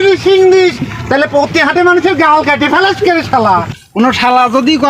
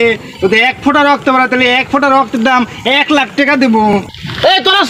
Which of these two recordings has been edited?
first; 1 cut; at 3.8 s

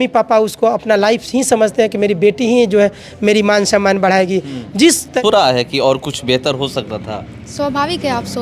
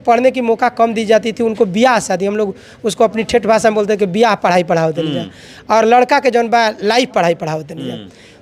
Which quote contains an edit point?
first; 1 cut; at 5.2 s

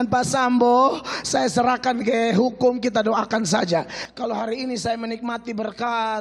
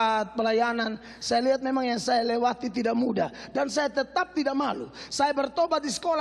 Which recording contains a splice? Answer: first; 1 cut; at 4.0 s

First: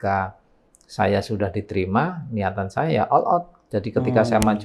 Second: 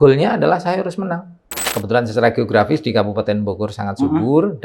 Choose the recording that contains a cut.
second; 1 cut; at 1.7 s

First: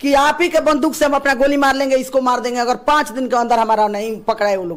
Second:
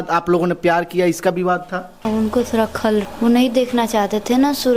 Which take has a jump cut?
second; 2 cuts; at 2.1 s, 3.1 s

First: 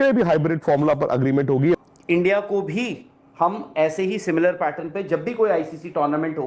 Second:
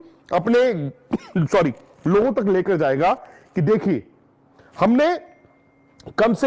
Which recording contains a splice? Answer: first; 1 cut; at 1.8 s

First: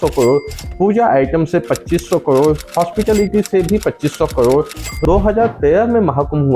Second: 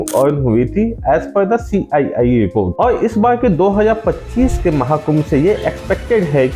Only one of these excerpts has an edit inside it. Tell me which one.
first; 1 cut; at 5.0 s

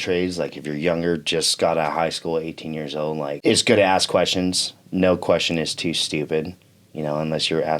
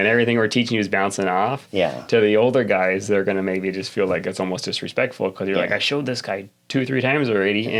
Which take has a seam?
first; 1 cut; at 3.4 s

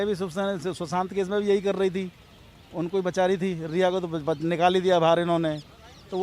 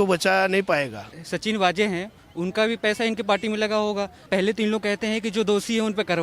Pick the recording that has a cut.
second; 2 cuts; at 1.1 s, 4.2 s

